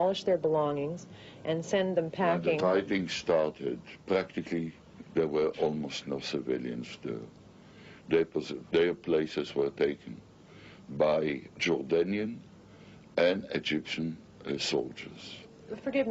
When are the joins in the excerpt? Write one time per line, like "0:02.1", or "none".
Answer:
0:03.1